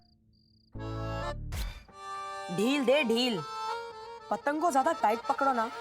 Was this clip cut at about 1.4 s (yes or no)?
yes